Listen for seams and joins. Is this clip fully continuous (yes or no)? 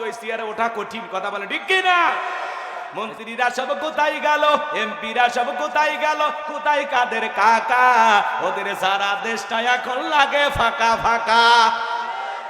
no